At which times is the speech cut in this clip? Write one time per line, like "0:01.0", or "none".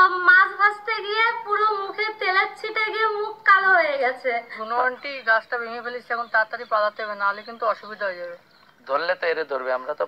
0:04.5
0:08.5